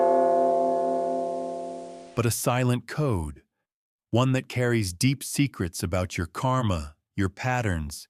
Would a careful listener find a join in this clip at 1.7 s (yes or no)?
yes